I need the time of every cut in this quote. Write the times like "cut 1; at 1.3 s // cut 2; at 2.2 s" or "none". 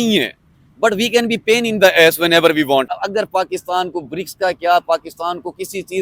cut 1; at 2.9 s